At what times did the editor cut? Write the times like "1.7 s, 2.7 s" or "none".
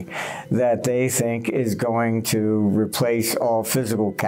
none